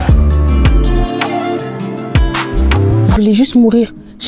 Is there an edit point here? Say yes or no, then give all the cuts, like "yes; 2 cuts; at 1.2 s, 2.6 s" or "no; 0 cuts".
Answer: yes; 1 cut; at 3.1 s